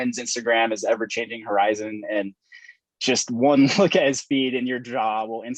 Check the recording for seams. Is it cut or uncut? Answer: uncut